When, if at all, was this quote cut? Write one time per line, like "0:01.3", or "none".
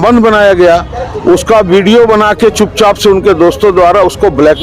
none